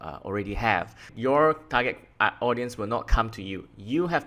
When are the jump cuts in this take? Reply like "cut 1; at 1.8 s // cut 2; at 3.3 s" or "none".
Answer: cut 1; at 1.1 s